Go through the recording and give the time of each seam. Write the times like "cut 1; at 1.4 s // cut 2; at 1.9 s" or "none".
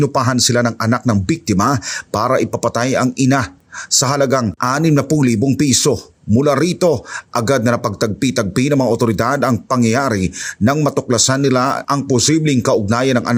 none